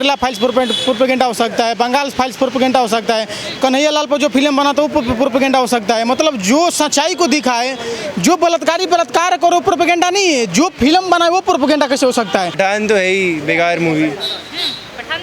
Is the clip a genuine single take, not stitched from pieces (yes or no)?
no